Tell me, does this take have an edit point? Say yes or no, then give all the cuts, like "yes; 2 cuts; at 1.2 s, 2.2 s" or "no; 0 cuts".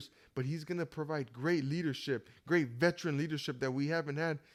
no; 0 cuts